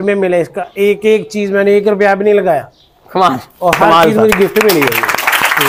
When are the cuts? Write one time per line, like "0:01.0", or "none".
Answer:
none